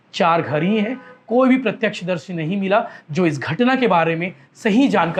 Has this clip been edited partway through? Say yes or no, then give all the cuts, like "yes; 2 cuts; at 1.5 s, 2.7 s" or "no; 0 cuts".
no; 0 cuts